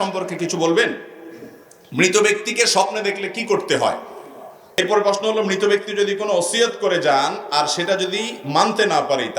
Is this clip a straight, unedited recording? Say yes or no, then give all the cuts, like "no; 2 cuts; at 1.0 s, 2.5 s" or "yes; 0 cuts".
no; 1 cut; at 4.8 s